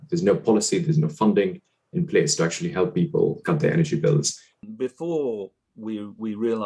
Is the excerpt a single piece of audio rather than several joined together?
no; 1 cut; at 4.5 s

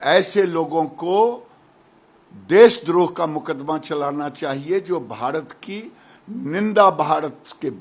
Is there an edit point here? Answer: no; 0 cuts

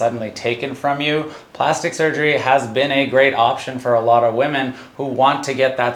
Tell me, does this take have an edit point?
no; 0 cuts

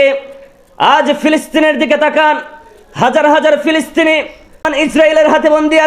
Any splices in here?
yes; 1 cut; at 4.7 s

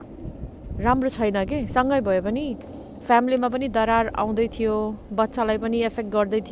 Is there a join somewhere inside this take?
no; 0 cuts

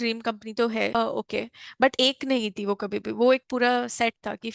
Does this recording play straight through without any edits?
yes; 0 cuts

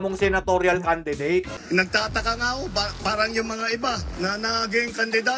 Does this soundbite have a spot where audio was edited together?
yes; 1 cut; at 1.6 s

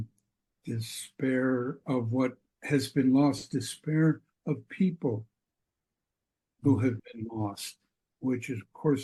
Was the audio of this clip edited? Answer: no; 0 cuts

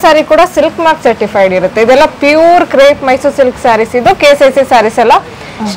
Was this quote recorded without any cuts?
yes; 0 cuts

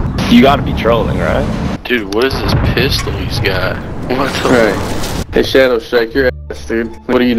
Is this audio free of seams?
no; 2 cuts; at 1.7 s, 5.2 s

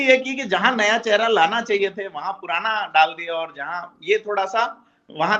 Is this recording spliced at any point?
no; 0 cuts

